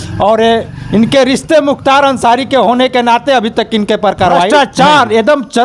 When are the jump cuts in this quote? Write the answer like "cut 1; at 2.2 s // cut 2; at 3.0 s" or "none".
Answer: cut 1; at 4.5 s